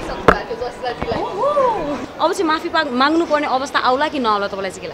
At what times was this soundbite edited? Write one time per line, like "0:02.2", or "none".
0:02.0